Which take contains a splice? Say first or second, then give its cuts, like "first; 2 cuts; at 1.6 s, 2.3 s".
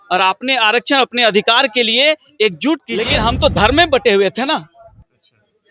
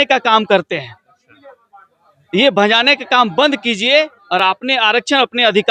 first; 1 cut; at 2.9 s